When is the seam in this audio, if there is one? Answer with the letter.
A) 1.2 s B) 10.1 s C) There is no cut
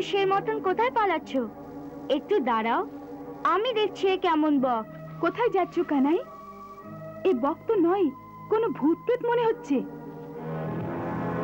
C